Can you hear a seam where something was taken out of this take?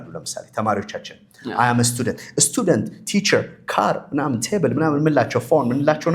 no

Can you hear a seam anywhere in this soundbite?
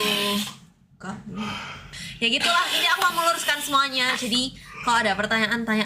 yes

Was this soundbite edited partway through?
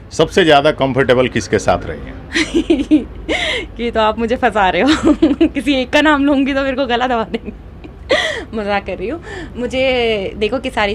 no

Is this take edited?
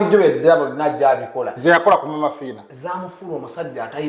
no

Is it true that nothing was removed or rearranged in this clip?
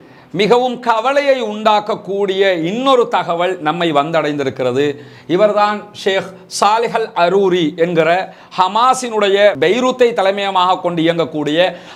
yes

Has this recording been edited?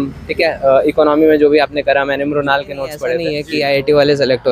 yes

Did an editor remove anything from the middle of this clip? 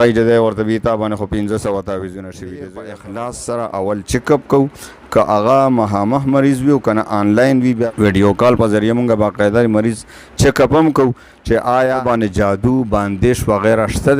yes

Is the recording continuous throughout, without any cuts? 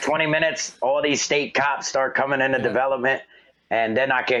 yes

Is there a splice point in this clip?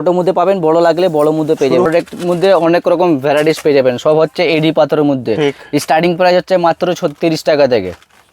yes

